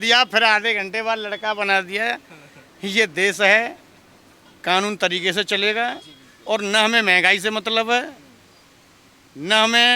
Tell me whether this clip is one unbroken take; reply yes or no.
yes